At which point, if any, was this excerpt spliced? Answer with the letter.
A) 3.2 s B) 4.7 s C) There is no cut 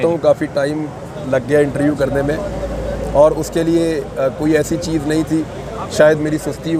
C